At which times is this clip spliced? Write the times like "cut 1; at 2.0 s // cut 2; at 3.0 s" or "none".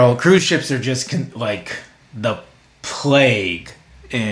none